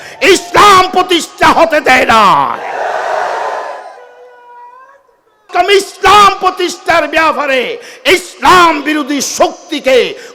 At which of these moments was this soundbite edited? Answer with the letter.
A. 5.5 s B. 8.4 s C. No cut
A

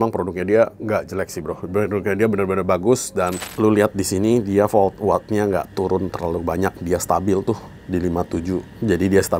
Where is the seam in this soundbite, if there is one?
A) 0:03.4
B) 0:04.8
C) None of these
A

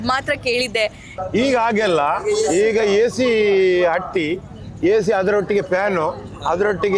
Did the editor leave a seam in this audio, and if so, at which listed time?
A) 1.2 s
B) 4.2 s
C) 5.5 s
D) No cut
A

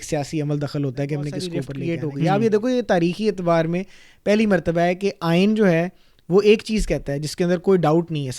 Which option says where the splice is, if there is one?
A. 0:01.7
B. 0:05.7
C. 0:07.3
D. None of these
A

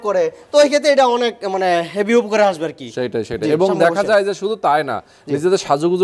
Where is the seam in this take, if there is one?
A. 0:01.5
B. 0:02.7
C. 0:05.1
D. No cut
D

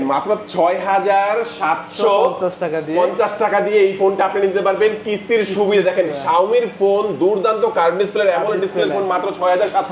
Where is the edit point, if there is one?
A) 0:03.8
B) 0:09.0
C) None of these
C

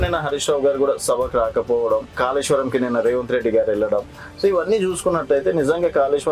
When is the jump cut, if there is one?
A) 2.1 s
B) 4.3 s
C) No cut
A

